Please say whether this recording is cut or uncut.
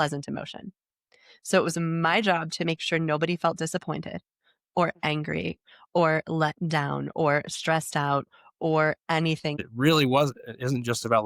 cut